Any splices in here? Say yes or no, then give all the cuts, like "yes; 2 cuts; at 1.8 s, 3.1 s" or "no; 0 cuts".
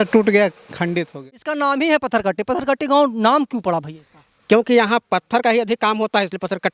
yes; 1 cut; at 1.1 s